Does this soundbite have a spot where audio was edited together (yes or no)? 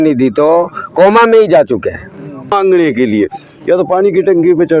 yes